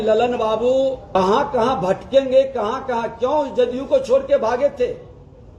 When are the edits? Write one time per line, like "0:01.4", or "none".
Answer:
0:01.1

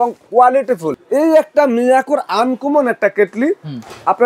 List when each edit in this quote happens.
0:00.9

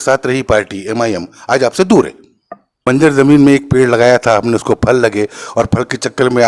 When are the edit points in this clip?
0:02.6

